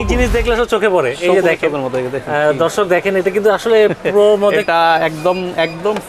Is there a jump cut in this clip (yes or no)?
no